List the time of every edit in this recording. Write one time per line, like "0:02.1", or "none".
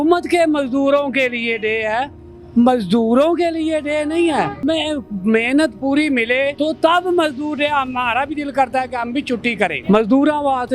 0:04.6
0:06.5
0:09.8